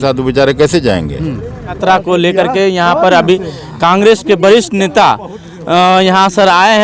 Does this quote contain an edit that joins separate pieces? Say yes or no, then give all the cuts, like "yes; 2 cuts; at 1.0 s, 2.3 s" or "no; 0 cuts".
no; 0 cuts